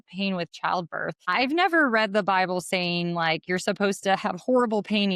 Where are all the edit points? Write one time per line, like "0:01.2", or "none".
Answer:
0:01.2